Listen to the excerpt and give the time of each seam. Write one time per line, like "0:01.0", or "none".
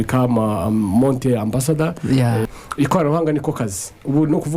0:02.5